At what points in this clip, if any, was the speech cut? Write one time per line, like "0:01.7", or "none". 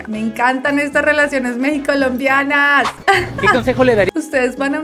0:02.9